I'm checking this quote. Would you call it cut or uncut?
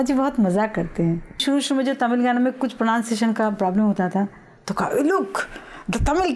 cut